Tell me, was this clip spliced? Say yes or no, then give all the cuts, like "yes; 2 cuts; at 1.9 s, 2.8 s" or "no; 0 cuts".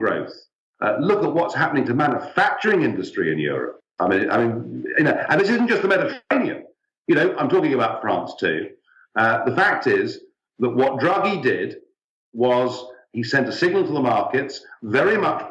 yes; 1 cut; at 5.4 s